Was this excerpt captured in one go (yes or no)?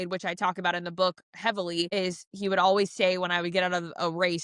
yes